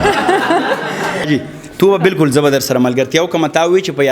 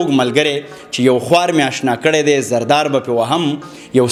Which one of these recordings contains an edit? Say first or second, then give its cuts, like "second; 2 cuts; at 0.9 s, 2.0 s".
first; 1 cut; at 1.3 s